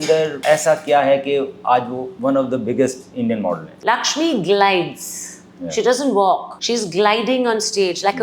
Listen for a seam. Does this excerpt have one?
yes; 1 cut; at 3.7 s

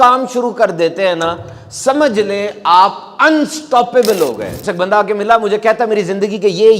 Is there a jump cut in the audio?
yes; 1 cut; at 4.6 s

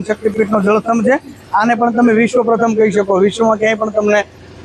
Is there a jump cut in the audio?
no; 0 cuts

